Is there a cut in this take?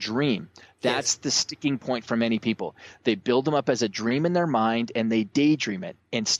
no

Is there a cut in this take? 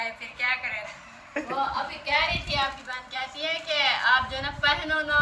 no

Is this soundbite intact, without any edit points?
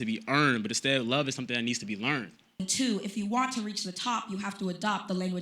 no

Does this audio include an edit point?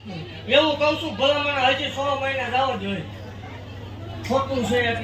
no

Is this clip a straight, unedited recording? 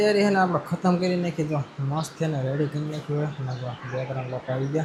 yes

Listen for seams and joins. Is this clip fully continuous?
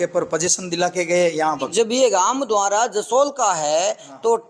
no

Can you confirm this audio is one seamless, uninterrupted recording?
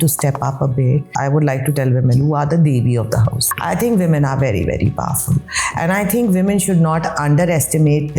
no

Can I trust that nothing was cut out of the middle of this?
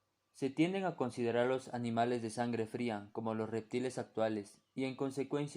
no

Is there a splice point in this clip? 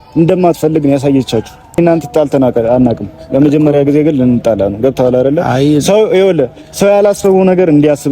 yes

